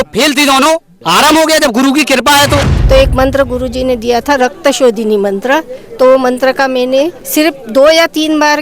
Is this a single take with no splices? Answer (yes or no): no